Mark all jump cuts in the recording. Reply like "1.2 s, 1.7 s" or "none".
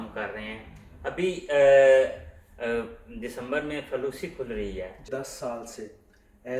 5.0 s

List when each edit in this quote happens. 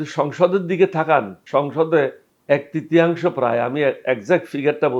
1.4 s, 2.3 s

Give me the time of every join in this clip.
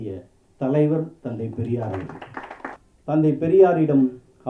2.8 s

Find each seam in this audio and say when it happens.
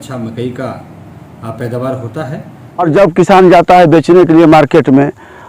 2.9 s

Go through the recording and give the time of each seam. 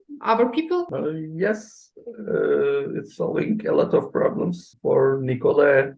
0.9 s, 4.7 s

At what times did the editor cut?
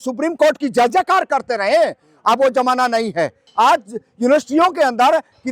3.4 s

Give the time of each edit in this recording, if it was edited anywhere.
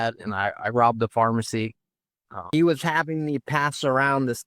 2.5 s

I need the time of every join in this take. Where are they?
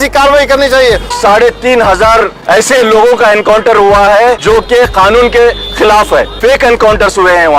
1.2 s, 2.4 s, 4.4 s

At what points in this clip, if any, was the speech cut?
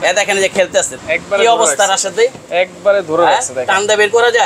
1.0 s

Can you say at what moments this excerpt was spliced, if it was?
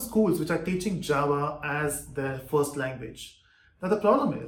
none

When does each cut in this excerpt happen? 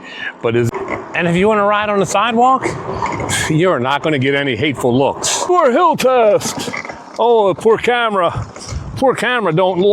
0.7 s, 5.5 s

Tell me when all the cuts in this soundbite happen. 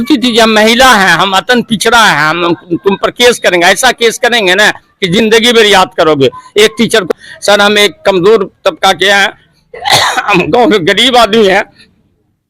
7.1 s

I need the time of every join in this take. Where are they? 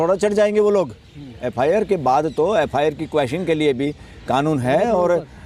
none

